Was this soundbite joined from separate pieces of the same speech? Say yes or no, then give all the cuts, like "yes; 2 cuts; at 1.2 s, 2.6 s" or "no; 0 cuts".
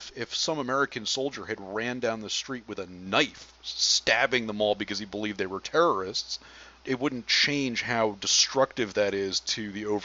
yes; 1 cut; at 6.8 s